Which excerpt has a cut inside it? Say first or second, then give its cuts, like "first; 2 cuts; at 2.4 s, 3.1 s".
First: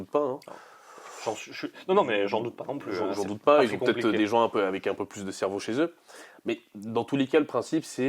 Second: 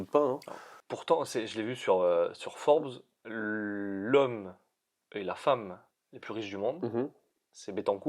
second; 1 cut; at 0.9 s